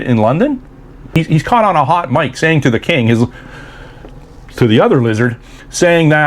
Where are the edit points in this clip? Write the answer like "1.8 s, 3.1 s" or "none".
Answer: 1.1 s